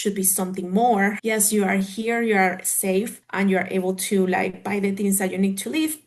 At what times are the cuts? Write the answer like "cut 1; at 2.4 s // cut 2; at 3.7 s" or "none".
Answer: cut 1; at 1.2 s // cut 2; at 3.2 s